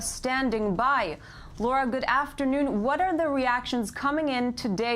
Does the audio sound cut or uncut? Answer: cut